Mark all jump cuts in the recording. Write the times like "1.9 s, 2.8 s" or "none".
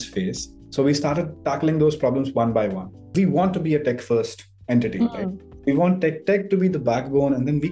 3.0 s, 5.4 s